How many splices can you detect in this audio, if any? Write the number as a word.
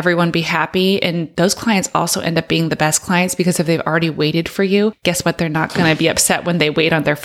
two